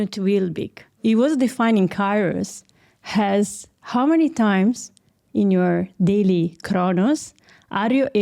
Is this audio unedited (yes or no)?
no